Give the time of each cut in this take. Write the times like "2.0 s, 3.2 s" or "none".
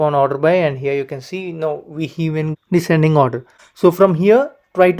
3.5 s